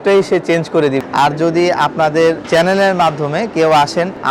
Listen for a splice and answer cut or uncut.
cut